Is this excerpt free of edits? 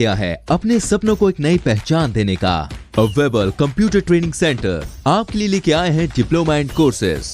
yes; 0 cuts

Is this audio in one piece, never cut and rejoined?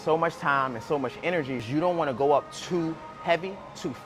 no; 1 cut; at 1.7 s

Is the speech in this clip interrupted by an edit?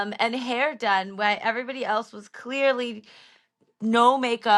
no; 0 cuts

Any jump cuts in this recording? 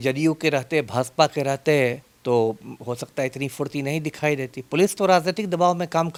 no; 0 cuts

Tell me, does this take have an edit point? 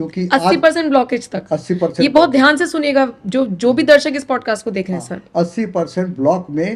no; 0 cuts

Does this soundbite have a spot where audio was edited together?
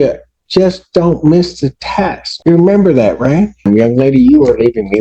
yes; 2 cuts; at 2.3 s, 3.6 s

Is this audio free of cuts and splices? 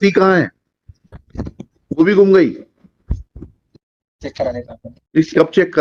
yes; 0 cuts

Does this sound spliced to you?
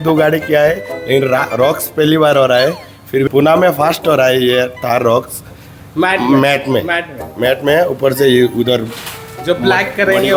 no; 0 cuts

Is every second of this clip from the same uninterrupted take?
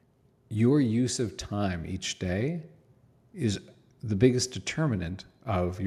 yes; 0 cuts

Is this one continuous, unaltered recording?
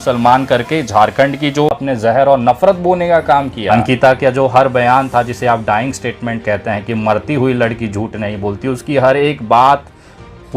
no; 2 cuts; at 1.8 s, 3.7 s

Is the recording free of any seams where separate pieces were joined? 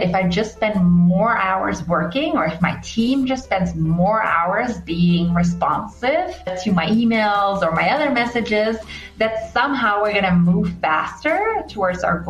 yes; 0 cuts

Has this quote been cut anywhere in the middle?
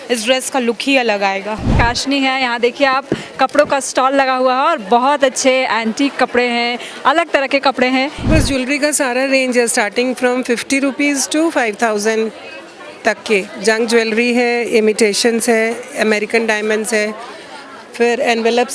yes; 2 cuts; at 1.7 s, 8.3 s

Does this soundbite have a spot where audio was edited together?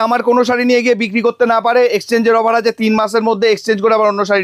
no; 0 cuts

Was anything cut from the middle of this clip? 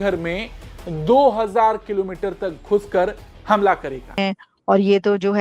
yes; 1 cut; at 4.2 s

